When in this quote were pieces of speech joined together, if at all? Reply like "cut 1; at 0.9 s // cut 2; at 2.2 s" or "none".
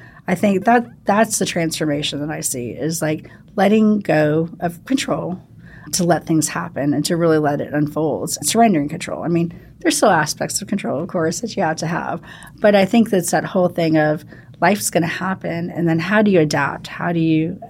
cut 1; at 5.9 s // cut 2; at 8.4 s